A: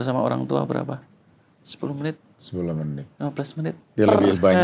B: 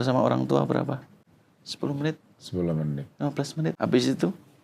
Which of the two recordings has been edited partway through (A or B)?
B